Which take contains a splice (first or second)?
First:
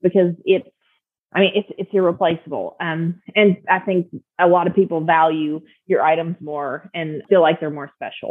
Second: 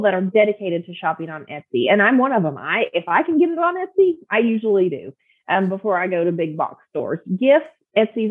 first